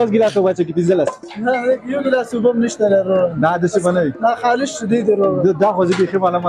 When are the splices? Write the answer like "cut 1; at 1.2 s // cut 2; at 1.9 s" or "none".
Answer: none